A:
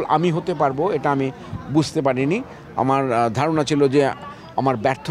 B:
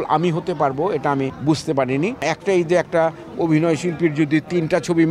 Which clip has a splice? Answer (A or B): B